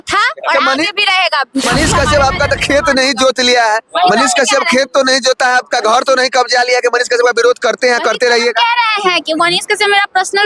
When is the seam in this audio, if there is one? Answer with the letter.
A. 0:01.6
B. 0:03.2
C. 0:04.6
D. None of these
A